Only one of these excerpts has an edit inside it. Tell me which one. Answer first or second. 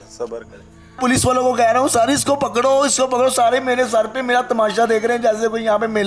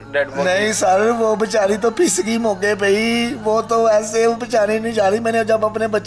first